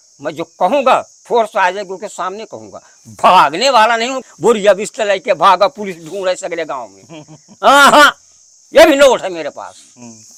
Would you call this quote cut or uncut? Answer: uncut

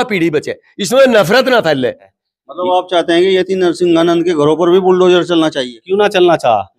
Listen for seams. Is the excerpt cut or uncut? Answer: cut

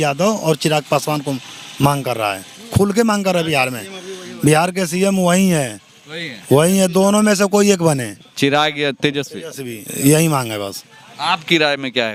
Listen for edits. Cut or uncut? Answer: uncut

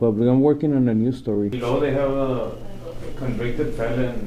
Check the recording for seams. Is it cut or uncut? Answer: cut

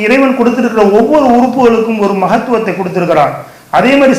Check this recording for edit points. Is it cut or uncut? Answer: uncut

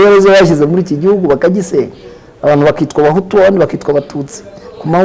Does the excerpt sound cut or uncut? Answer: uncut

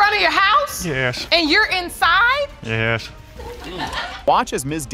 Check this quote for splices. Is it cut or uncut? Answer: uncut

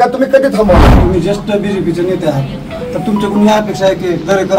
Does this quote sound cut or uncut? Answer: cut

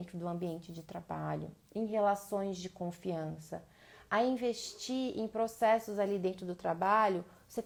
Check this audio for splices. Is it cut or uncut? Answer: uncut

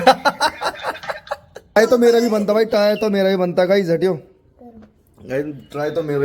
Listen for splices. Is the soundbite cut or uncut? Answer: cut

